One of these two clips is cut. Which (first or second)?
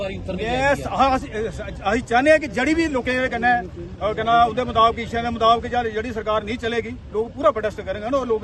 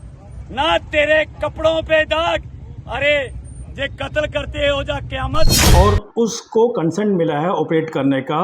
second